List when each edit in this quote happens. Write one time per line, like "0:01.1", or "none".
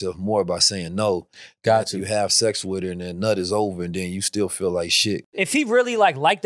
0:05.3